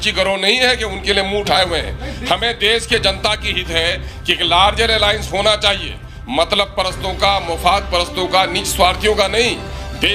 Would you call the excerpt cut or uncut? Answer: uncut